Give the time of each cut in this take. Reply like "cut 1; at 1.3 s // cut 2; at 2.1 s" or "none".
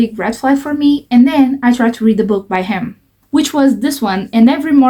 none